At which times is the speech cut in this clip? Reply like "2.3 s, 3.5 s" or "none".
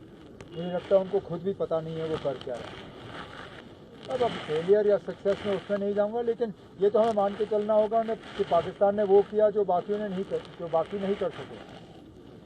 3.6 s